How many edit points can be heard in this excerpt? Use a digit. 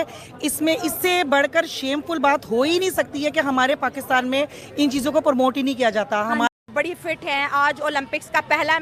1